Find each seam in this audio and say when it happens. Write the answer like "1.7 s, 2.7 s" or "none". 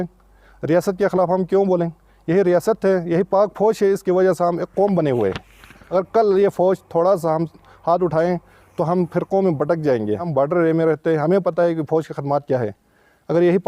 5.7 s, 10.3 s